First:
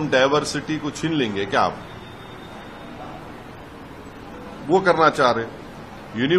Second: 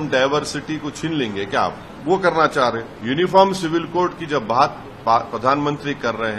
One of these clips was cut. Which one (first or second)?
second